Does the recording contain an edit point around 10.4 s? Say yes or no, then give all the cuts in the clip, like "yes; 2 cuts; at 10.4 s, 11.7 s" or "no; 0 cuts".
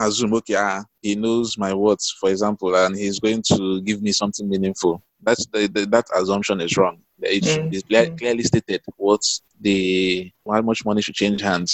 yes; 1 cut; at 10.4 s